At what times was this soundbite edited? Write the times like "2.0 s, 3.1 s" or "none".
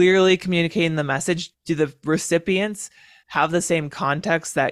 none